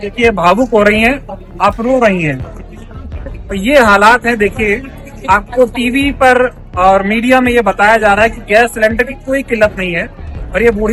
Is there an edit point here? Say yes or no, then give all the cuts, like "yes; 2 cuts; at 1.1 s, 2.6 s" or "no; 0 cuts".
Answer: no; 0 cuts